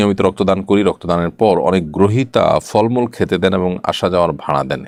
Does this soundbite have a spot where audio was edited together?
no; 0 cuts

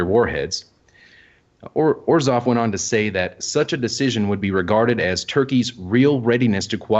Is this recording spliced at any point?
yes; 1 cut; at 4.0 s

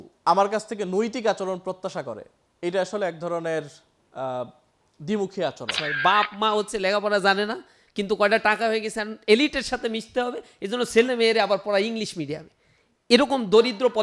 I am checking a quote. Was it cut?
yes; 1 cut; at 5.9 s

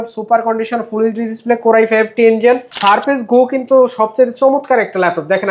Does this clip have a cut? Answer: yes; 1 cut; at 2.7 s

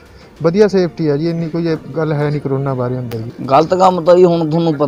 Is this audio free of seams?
no; 1 cut; at 3.3 s

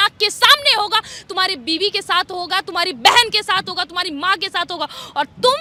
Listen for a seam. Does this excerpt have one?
no; 0 cuts

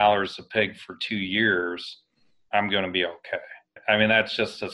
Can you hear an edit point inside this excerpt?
yes; 1 cut; at 3.6 s

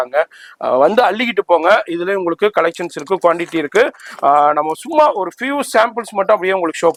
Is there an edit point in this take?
no; 0 cuts

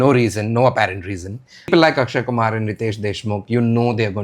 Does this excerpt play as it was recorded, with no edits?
no; 1 cut; at 1.7 s

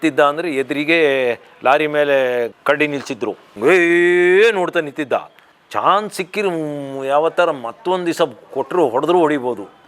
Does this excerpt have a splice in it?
yes; 1 cut; at 3.4 s

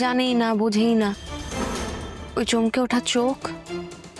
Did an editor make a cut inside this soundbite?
yes; 1 cut; at 2.1 s

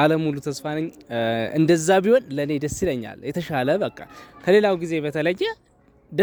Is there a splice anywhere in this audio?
no; 0 cuts

